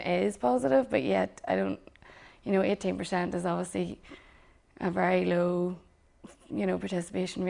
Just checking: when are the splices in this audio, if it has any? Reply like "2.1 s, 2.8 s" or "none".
3.8 s